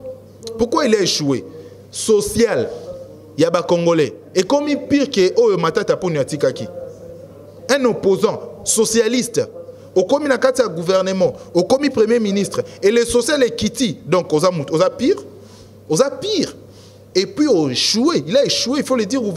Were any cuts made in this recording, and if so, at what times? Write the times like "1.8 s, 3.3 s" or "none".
none